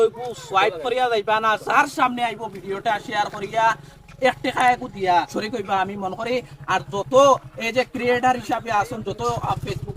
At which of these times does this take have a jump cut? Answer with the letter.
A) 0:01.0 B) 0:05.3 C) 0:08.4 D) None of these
B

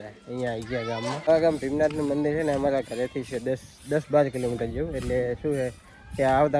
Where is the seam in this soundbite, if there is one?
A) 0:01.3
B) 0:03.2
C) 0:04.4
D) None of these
A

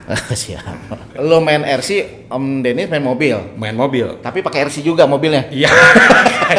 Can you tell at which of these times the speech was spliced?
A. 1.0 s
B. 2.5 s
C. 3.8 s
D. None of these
A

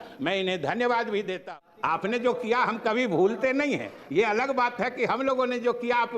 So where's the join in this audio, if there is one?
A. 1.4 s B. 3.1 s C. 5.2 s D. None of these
A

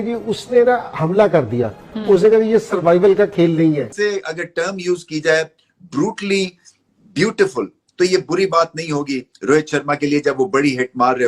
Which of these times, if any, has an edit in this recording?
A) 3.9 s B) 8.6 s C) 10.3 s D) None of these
A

